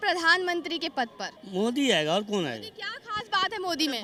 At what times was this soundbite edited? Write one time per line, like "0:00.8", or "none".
none